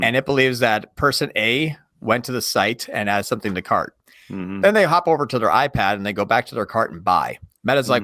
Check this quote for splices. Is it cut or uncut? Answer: uncut